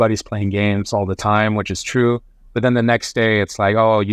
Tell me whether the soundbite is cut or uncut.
uncut